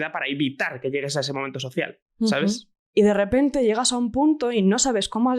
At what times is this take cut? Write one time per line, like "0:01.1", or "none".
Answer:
0:02.7